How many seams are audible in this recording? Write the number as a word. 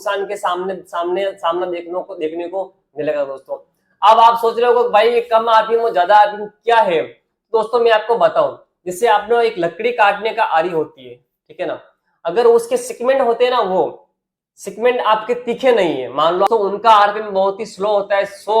one